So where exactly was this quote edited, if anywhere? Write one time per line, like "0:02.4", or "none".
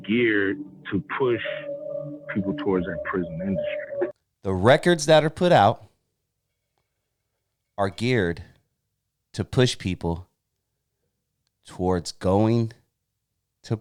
none